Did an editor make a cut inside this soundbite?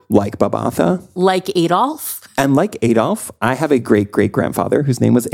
no; 0 cuts

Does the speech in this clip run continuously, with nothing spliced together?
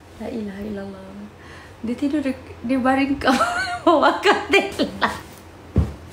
no; 1 cut; at 5.2 s

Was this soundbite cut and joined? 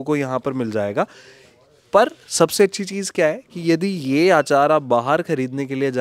no; 0 cuts

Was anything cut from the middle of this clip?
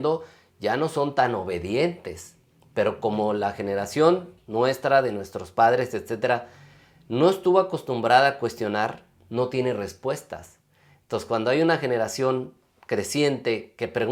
no; 0 cuts

